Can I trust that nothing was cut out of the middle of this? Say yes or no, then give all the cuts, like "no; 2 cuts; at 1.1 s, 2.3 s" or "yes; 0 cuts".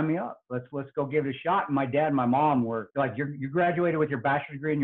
no; 1 cut; at 2.9 s